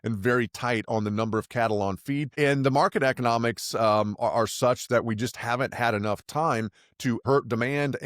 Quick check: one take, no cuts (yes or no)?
no